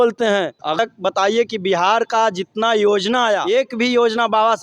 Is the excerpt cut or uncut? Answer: cut